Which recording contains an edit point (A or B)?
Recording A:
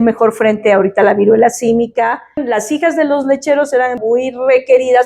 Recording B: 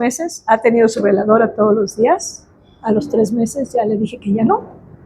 A